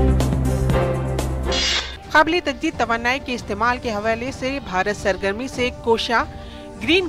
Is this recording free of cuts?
no; 1 cut; at 1.8 s

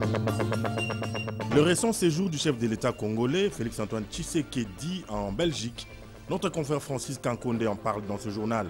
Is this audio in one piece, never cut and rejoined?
no; 1 cut; at 1.3 s

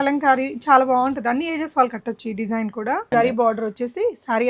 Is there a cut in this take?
yes; 1 cut; at 3.1 s

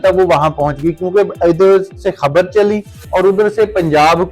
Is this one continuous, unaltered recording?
yes; 0 cuts

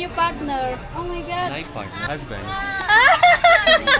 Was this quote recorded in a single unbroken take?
no; 1 cut; at 2.0 s

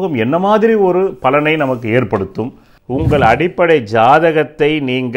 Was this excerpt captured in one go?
no; 1 cut; at 2.7 s

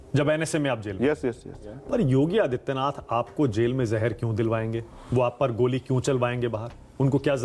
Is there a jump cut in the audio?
yes; 1 cut; at 1.8 s

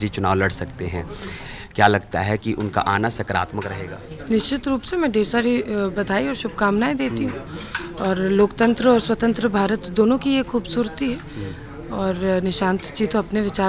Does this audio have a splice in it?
no; 0 cuts

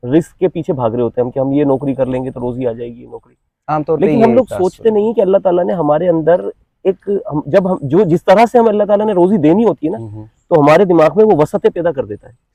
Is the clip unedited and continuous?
yes; 0 cuts

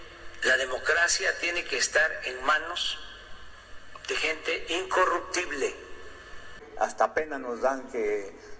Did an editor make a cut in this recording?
yes; 1 cut; at 6.6 s

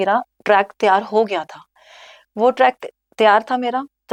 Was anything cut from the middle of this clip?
no; 0 cuts

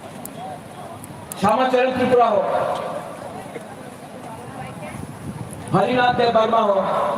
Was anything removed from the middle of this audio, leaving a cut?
yes; 3 cuts; at 3.5 s, 4.9 s, 5.9 s

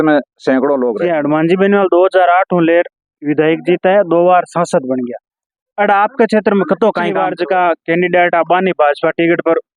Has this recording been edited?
yes; 2 cuts; at 0.9 s, 7.1 s

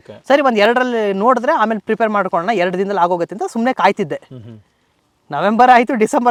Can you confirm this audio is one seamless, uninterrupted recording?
yes; 0 cuts

